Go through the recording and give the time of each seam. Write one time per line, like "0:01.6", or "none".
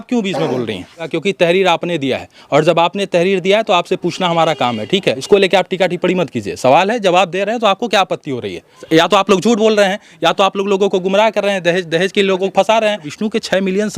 0:01.0
0:05.2
0:08.7
0:13.1